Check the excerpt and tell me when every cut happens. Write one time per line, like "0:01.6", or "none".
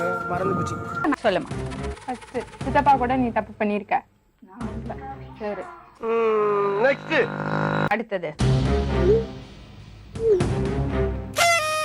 0:01.1
0:07.9